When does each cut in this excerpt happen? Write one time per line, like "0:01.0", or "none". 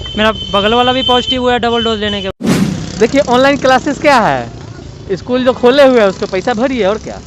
0:02.3